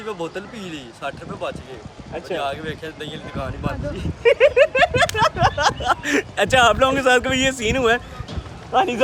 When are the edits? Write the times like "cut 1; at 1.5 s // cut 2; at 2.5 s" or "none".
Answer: none